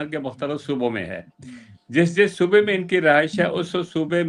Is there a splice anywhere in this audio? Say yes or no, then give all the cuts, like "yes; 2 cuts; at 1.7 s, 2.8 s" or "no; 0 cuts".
no; 0 cuts